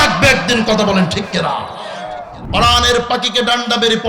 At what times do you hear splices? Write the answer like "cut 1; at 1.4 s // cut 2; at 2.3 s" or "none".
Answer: cut 1; at 2.3 s